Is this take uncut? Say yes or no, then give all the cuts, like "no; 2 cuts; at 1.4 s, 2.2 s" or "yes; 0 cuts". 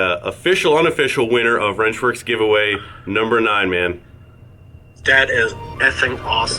yes; 0 cuts